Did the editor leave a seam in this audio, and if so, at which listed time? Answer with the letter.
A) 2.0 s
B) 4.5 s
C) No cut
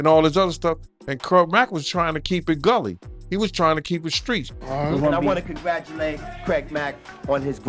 B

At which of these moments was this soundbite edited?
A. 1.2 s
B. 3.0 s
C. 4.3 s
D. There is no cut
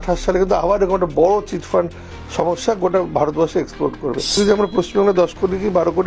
C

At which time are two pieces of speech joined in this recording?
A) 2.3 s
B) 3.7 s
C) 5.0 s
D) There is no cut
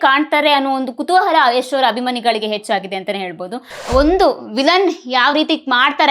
B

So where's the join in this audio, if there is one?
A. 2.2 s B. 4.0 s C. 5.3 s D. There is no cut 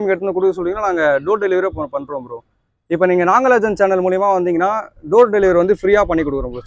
D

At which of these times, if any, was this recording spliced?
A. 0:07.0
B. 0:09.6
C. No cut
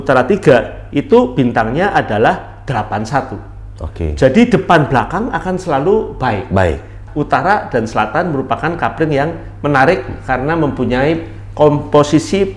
A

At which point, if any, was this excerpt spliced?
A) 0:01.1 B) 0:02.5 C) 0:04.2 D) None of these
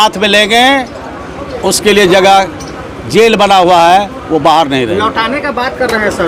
D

